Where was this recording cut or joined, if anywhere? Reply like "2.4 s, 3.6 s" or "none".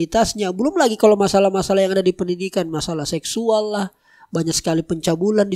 none

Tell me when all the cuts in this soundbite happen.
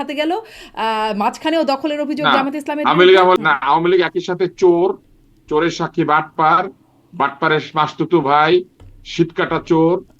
3.3 s

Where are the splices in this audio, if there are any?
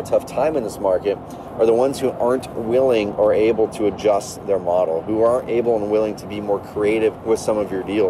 7.2 s

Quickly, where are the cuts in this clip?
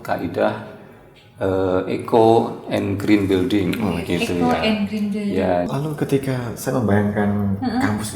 5.7 s

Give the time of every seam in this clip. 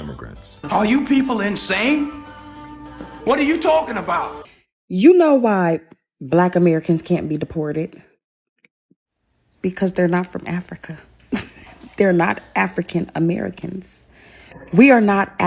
4.4 s

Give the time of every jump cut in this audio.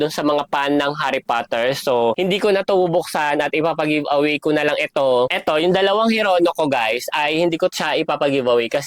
2.2 s, 5.4 s

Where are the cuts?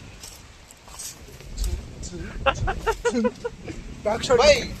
3.5 s

